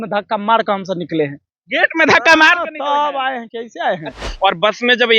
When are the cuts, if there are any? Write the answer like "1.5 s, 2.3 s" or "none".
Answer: 4.2 s

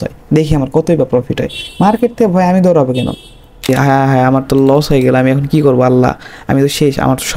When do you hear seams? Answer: 3.7 s

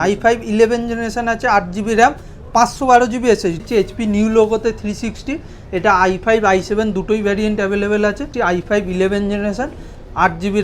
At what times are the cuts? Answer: 3.6 s, 8.2 s

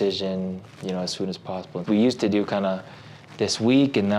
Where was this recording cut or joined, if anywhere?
1.8 s

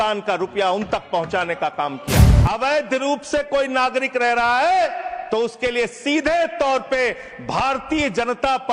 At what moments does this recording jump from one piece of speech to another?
2.3 s

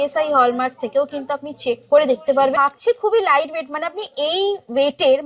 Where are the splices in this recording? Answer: 2.6 s

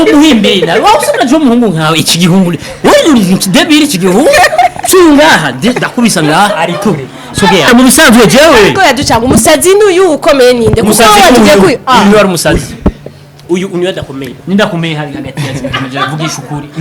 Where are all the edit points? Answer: 7.7 s

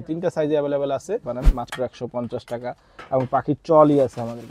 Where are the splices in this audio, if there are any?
1.3 s

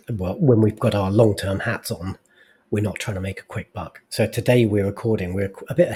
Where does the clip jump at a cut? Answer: none

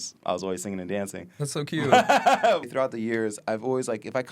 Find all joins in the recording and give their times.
2.6 s

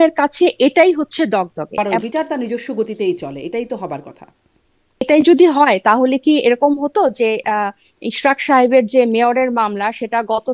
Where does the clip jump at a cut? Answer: 1.8 s, 5.0 s

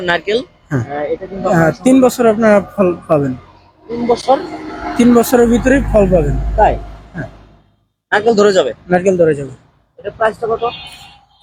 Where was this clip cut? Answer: none

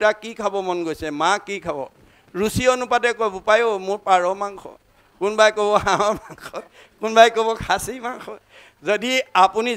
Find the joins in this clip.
none

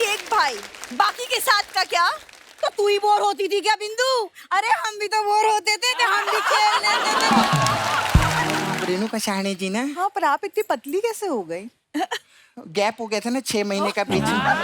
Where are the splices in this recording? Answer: 8.8 s

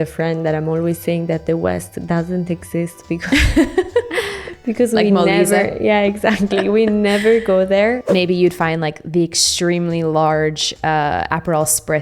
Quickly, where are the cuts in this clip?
8.0 s

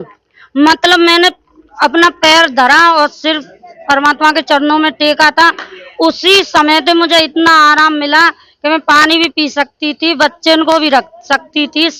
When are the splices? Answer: none

